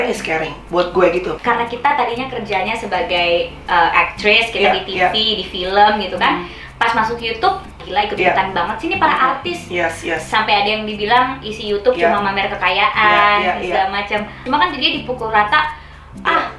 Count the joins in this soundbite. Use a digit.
3